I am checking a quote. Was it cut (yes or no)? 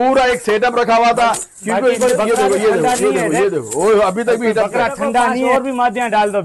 yes